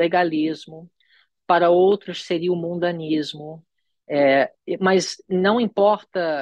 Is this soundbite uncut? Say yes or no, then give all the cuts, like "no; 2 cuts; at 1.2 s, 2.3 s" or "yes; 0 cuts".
yes; 0 cuts